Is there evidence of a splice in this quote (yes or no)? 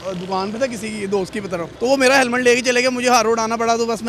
yes